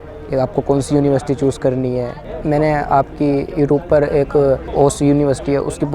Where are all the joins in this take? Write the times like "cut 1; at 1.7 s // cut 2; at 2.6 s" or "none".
cut 1; at 2.2 s // cut 2; at 4.7 s

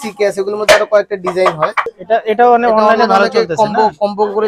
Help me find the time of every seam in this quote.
cut 1; at 1.9 s

